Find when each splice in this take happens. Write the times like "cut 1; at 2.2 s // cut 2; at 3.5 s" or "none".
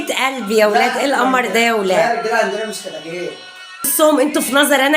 cut 1; at 3.9 s